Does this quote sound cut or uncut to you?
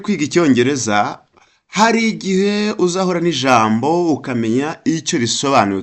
uncut